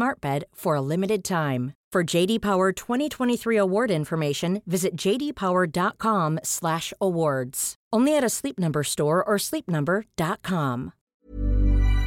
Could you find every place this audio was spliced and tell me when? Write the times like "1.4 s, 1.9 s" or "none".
11.0 s

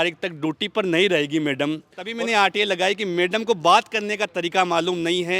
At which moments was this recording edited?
2.1 s

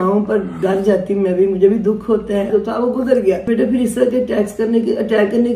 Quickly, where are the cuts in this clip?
2.5 s, 3.5 s

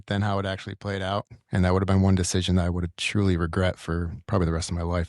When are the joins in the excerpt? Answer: 1.4 s

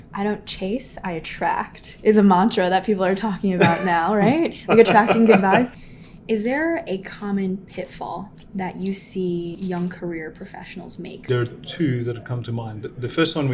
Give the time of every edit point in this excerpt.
5.8 s, 8.4 s, 9.5 s, 11.2 s

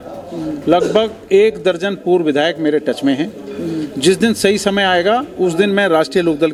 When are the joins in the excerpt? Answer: none

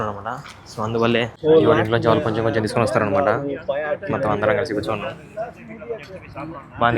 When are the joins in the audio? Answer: 1.3 s

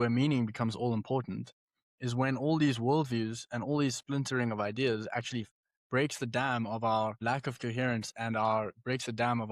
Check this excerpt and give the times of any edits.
7.2 s

